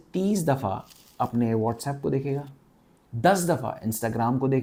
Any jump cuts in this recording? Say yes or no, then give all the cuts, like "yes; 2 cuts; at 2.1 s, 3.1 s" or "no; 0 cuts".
no; 0 cuts